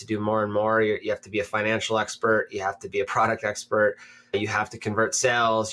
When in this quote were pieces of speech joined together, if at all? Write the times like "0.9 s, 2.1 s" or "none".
4.3 s

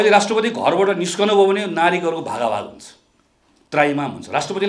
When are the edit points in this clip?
none

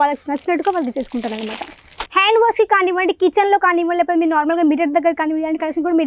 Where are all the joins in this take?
2.1 s

